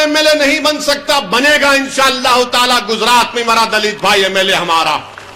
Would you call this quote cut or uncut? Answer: uncut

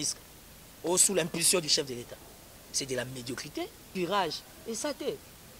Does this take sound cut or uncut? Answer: cut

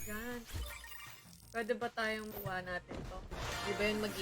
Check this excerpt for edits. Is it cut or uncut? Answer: cut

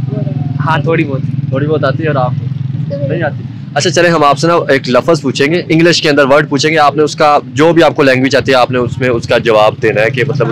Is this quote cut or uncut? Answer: uncut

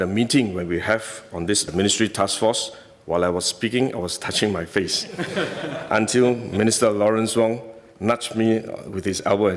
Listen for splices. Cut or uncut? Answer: uncut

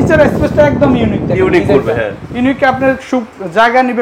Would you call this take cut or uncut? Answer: uncut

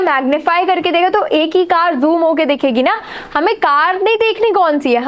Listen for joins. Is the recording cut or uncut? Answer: uncut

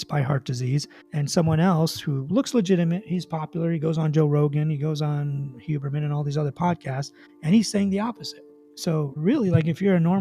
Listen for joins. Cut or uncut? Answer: uncut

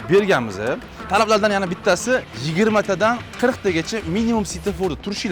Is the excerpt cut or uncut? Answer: cut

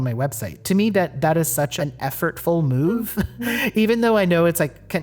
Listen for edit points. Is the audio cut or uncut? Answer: cut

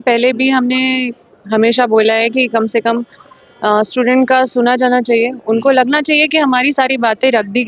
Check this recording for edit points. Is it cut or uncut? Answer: uncut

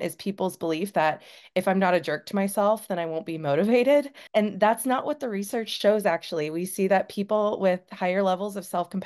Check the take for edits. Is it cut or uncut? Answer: cut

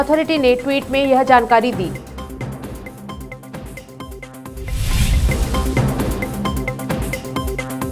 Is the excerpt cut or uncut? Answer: uncut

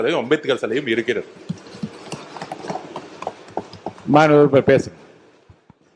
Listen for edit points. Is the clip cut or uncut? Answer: uncut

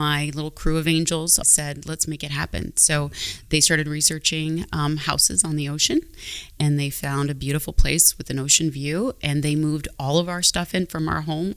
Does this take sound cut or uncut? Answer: cut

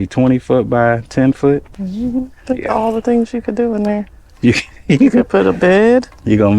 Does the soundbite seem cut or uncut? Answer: cut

